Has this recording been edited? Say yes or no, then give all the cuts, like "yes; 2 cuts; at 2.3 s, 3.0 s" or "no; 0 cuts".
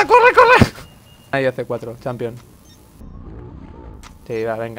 yes; 1 cut; at 1.3 s